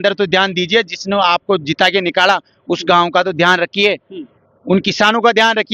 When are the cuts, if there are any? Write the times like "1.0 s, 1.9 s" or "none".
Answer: none

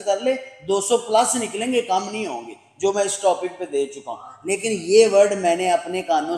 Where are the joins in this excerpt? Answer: none

